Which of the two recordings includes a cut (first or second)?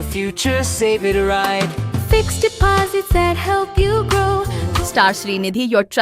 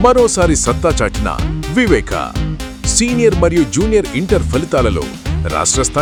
first